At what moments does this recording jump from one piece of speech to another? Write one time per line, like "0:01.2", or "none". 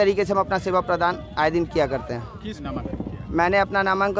0:02.6